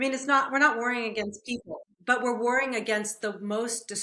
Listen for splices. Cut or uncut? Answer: uncut